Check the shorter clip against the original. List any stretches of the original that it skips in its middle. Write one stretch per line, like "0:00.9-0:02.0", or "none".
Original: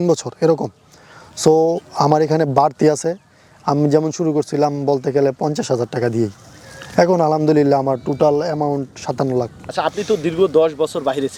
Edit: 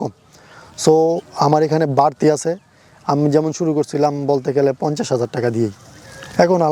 none